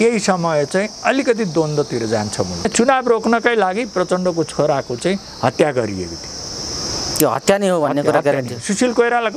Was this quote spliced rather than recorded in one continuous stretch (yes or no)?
yes